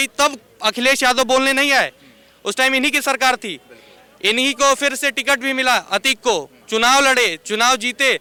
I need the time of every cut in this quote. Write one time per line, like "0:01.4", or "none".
none